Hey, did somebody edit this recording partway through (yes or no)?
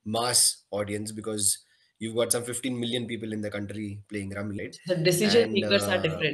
yes